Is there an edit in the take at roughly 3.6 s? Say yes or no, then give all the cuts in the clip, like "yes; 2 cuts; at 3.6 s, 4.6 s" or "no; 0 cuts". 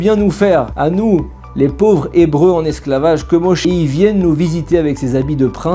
yes; 1 cut; at 3.6 s